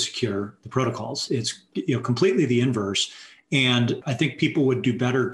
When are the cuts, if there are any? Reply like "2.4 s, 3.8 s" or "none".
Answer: 1.2 s, 4.0 s